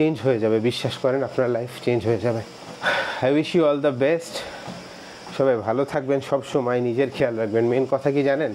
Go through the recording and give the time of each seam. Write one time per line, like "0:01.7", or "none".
none